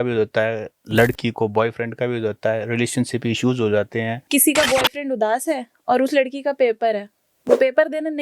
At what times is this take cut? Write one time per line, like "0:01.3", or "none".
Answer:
0:04.2